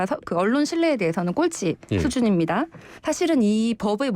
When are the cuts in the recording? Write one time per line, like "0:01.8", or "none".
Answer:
0:02.9